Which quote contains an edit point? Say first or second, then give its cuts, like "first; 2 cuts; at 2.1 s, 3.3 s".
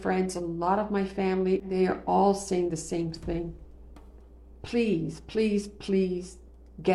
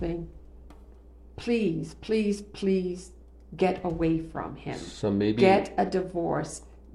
first; 1 cut; at 1.7 s